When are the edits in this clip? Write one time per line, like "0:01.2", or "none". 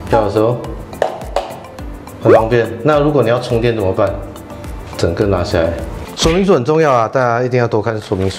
0:06.2